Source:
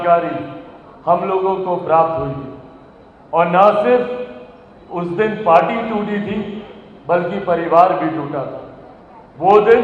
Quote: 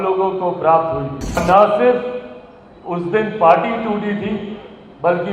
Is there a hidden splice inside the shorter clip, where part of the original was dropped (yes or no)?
yes